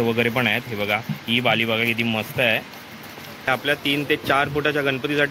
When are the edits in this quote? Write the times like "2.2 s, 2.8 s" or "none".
3.5 s